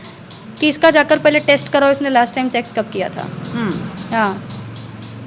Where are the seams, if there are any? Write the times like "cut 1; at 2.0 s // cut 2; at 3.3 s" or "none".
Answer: none